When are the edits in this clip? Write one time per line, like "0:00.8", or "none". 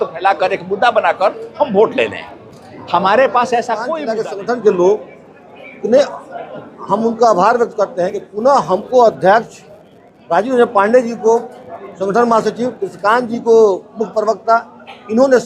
0:03.9